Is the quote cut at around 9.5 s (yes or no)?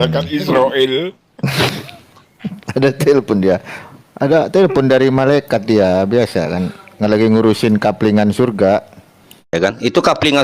yes